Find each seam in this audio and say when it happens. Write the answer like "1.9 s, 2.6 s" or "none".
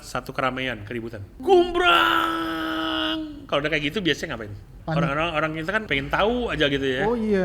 1.3 s, 4.7 s, 5.9 s